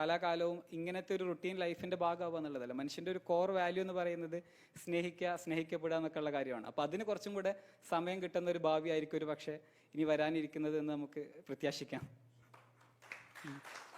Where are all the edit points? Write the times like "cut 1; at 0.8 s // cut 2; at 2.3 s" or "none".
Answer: none